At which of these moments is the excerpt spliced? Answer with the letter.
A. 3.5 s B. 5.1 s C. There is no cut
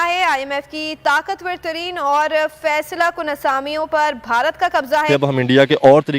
B